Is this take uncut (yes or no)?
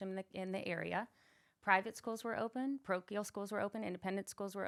yes